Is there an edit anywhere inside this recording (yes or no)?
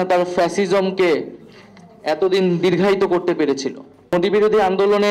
yes